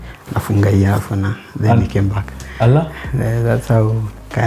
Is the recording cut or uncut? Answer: uncut